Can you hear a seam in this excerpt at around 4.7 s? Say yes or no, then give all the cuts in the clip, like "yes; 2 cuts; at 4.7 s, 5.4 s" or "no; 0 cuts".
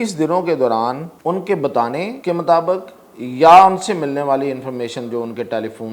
no; 2 cuts; at 1.1 s, 2.2 s